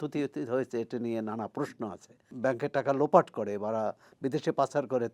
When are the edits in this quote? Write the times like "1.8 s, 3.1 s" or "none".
2.3 s